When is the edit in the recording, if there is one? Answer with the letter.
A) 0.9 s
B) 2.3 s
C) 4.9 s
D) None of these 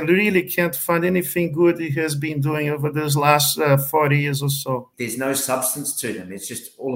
C